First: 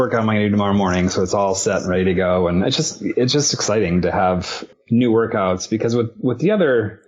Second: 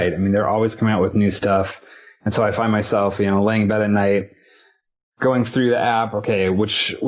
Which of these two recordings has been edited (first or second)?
first